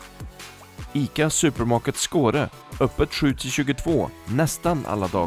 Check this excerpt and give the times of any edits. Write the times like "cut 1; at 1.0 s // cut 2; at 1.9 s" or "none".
cut 1; at 0.9 s

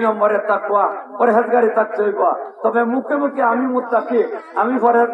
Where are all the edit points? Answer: none

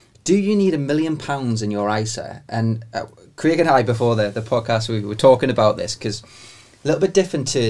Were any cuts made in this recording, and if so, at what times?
none

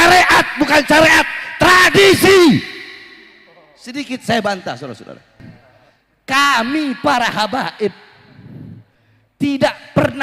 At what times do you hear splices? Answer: cut 1; at 5.4 s

